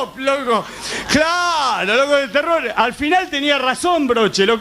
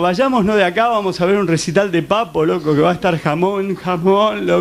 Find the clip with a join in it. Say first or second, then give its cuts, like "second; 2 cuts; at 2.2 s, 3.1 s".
first; 1 cut; at 1.8 s